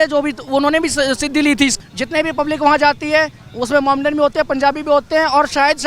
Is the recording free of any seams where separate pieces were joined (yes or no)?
no